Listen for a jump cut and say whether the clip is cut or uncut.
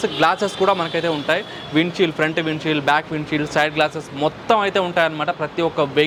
uncut